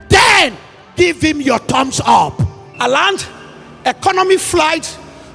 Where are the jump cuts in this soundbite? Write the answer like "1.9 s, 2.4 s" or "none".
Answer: 2.6 s